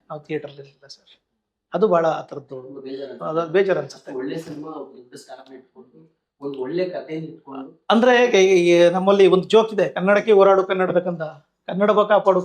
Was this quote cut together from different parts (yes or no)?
no